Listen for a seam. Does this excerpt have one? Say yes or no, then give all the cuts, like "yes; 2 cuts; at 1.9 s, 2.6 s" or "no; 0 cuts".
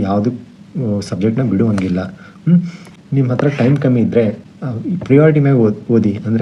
no; 0 cuts